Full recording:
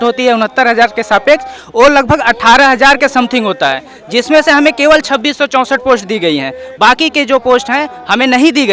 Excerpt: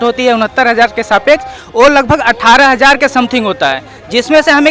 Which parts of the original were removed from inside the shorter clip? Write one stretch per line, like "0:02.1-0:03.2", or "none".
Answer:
none